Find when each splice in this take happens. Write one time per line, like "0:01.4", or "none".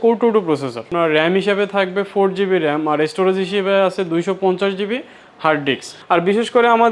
0:00.9
0:05.9

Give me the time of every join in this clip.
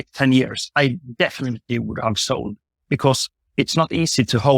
0:02.7

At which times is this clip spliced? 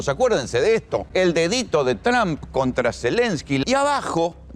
0:01.1
0:03.6

